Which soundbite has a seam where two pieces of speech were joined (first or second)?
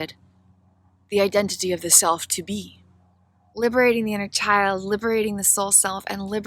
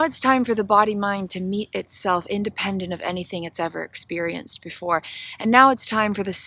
first